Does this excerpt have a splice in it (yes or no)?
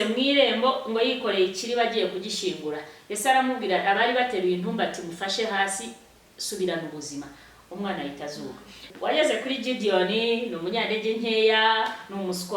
yes